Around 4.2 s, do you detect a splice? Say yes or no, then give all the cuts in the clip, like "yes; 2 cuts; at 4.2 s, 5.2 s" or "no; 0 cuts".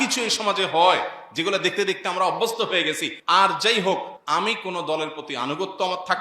yes; 2 cuts; at 3.1 s, 4.2 s